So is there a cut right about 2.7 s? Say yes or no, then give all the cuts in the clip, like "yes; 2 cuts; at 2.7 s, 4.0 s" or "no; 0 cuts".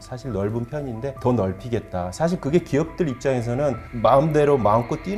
no; 2 cuts; at 1.2 s, 3.9 s